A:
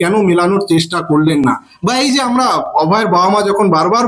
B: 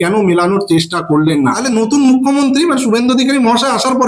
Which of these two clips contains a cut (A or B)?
B